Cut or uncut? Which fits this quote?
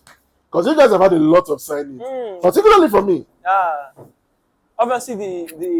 uncut